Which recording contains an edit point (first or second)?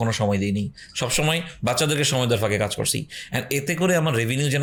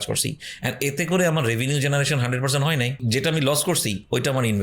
second